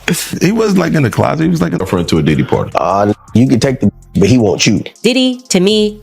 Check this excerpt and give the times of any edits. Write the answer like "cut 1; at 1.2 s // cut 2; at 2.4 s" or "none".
cut 1; at 1.8 s